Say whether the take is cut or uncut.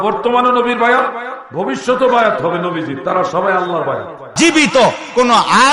cut